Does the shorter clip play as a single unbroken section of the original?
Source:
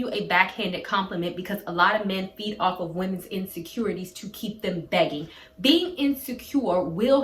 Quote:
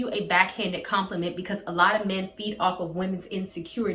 yes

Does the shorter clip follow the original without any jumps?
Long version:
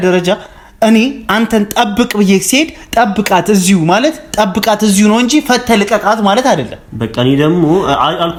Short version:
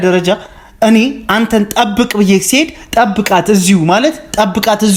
yes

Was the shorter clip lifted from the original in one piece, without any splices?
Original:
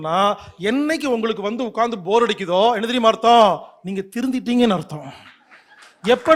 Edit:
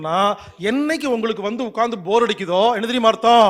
yes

